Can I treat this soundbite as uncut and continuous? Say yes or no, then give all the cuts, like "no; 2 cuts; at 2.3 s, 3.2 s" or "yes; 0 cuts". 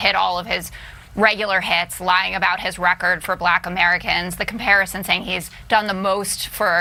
yes; 0 cuts